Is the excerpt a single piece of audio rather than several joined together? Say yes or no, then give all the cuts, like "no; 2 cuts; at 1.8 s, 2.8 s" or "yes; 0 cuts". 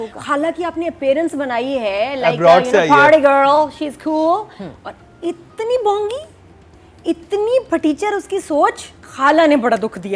yes; 0 cuts